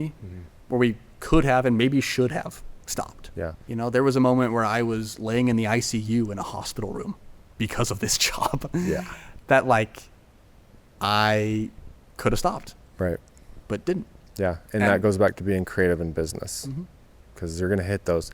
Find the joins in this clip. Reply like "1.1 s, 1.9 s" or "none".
3.6 s